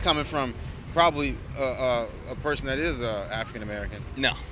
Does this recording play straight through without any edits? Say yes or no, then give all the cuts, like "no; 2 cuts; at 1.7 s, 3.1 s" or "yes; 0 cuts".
yes; 0 cuts